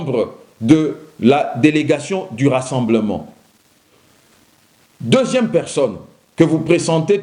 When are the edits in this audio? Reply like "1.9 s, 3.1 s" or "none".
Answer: 3.9 s